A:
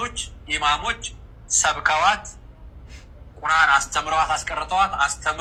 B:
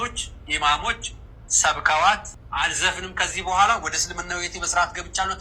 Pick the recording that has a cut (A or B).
B